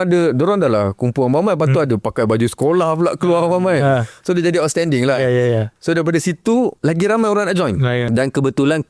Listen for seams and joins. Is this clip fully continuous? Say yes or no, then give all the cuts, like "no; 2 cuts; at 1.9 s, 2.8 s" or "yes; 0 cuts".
no; 2 cuts; at 6.8 s, 8.1 s